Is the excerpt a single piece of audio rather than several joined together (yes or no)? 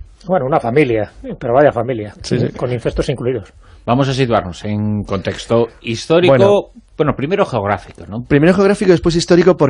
yes